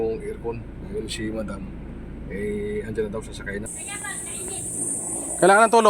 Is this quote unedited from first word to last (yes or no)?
no